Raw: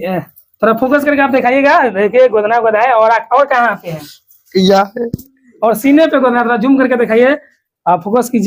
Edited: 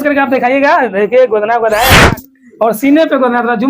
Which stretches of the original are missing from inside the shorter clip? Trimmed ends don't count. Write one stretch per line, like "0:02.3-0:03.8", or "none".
0:02.9-0:04.9